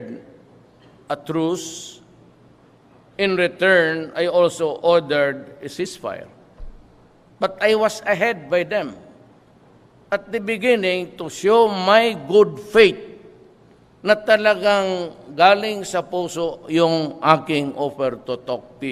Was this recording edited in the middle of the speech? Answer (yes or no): yes